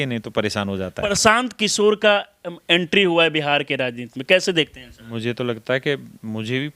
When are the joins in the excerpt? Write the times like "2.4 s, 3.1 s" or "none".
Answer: 1.2 s, 5.1 s